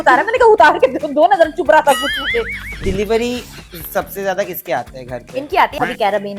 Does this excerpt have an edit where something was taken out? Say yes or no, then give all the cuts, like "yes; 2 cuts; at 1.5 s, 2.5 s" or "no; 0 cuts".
yes; 1 cut; at 2.8 s